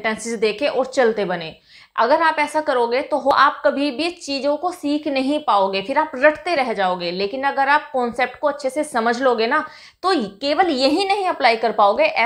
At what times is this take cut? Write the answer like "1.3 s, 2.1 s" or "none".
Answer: 3.3 s